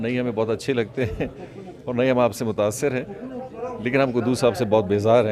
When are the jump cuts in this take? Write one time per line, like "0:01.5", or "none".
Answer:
none